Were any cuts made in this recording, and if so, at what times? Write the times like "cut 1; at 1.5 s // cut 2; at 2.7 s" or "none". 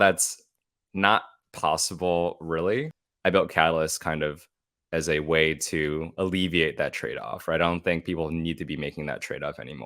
cut 1; at 3.0 s